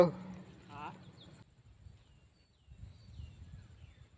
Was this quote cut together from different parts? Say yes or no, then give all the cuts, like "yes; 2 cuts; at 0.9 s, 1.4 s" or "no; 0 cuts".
yes; 1 cut; at 1.4 s